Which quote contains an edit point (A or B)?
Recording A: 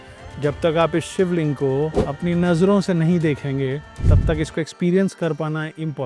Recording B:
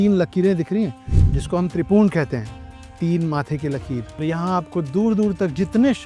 B